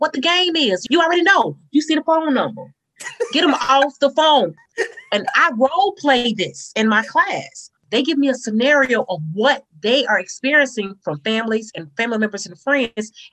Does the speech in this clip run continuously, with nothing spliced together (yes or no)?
no